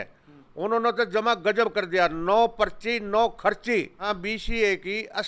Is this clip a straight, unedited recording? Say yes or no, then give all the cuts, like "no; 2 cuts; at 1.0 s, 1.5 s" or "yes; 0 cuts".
no; 1 cut; at 4.2 s